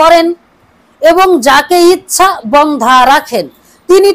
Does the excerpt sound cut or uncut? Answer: uncut